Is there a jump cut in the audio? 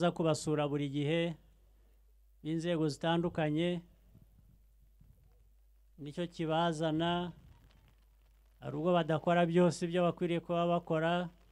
no; 0 cuts

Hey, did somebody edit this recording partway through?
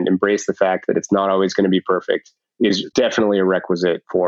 yes; 1 cut; at 2.9 s

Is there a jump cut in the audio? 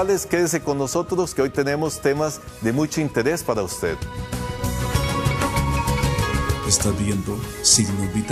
yes; 1 cut; at 1.1 s

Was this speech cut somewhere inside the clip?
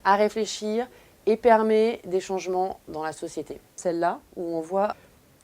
yes; 1 cut; at 3.7 s

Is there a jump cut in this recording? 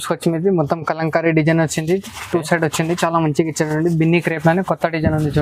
no; 0 cuts

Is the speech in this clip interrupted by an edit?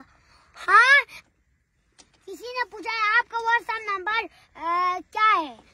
yes; 1 cut; at 1.2 s

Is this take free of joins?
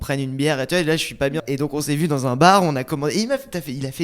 no; 1 cut; at 1.4 s

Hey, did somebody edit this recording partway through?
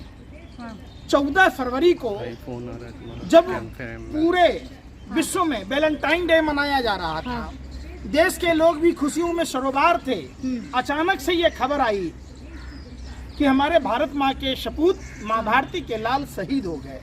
no; 0 cuts

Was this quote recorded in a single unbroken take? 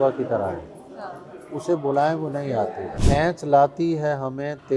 no; 1 cut; at 2.9 s

